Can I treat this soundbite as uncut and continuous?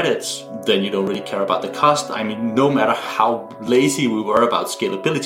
yes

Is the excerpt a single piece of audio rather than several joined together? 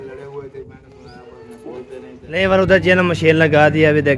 no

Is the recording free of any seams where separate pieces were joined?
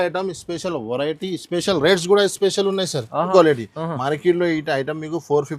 no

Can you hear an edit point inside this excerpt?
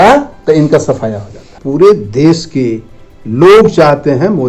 yes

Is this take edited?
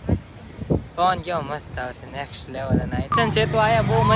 yes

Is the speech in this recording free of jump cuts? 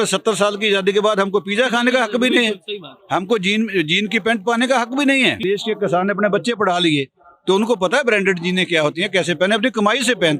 no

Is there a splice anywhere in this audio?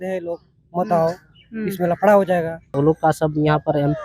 yes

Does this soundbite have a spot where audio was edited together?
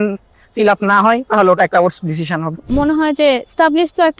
yes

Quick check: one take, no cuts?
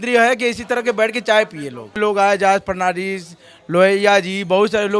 no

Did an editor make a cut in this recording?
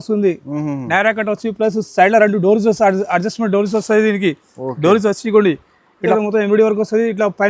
yes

